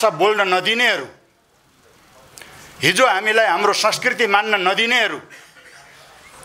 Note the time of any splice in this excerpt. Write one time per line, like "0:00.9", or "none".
none

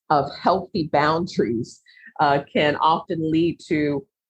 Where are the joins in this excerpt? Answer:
none

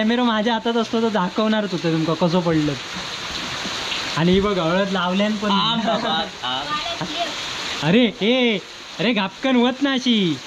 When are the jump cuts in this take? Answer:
none

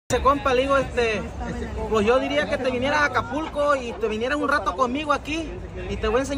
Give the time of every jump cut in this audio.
0:00.9

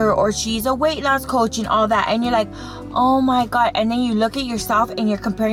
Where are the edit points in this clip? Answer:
none

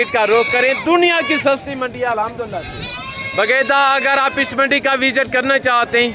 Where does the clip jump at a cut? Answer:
none

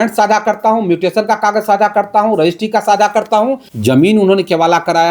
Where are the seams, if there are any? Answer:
0:03.7

